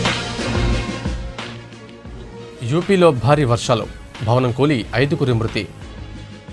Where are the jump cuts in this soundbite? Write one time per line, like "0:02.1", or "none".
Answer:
none